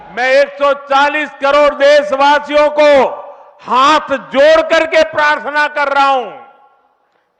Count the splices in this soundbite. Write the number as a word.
zero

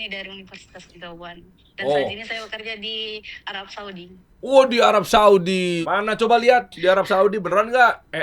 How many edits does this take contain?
one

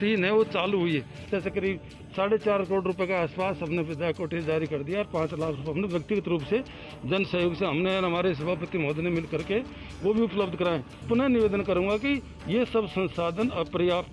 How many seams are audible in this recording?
two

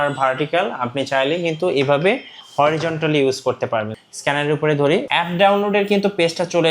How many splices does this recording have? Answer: one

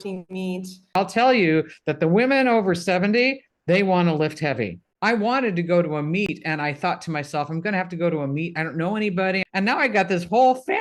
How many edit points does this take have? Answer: three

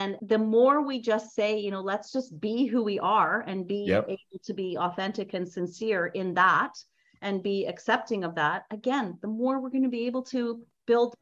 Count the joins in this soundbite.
zero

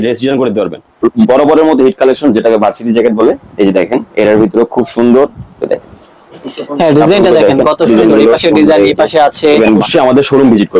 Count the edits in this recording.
two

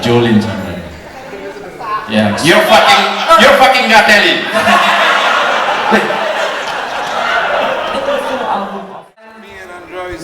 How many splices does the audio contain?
one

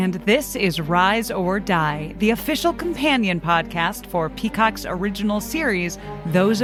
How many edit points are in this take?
zero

